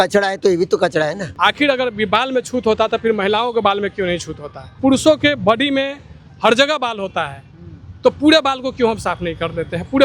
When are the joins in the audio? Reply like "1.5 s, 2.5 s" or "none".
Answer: 1.2 s, 4.8 s